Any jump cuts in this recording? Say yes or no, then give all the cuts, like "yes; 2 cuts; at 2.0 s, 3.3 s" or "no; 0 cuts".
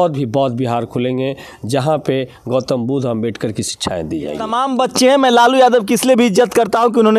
yes; 1 cut; at 4.5 s